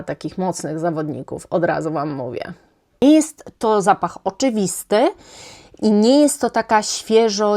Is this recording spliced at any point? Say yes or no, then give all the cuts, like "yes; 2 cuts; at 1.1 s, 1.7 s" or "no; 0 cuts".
yes; 1 cut; at 3.0 s